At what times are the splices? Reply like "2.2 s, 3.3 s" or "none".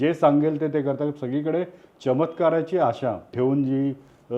3.3 s